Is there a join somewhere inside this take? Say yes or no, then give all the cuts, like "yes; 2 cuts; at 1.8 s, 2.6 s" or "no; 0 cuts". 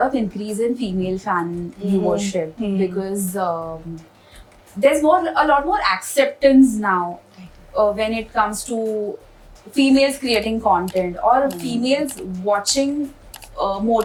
no; 0 cuts